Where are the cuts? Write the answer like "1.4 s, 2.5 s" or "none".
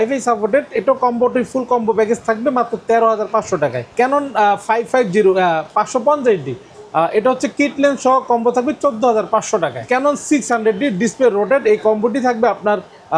3.9 s, 9.8 s